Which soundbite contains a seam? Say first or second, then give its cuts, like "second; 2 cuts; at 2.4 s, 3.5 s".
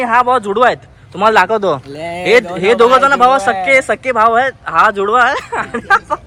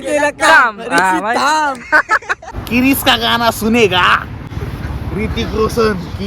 second; 2 cuts; at 2.5 s, 4.5 s